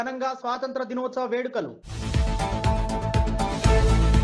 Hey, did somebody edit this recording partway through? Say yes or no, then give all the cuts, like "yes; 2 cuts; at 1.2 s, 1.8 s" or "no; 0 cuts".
no; 0 cuts